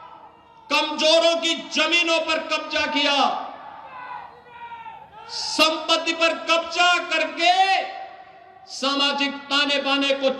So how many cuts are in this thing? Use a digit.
0